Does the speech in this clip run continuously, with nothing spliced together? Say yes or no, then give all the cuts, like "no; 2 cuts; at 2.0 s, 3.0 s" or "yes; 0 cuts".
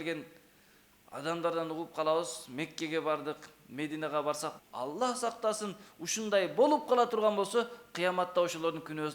no; 1 cut; at 4.5 s